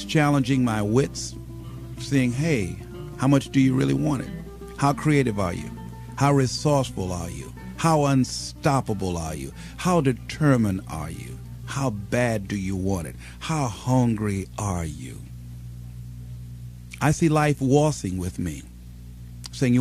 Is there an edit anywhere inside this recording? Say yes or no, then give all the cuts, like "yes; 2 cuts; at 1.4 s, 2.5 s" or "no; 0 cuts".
yes; 1 cut; at 2.1 s